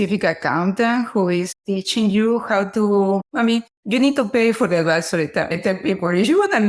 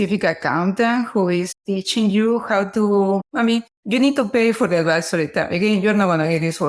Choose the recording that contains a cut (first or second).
first